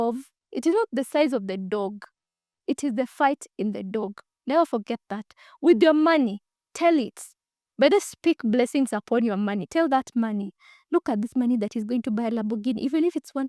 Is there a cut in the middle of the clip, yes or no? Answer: no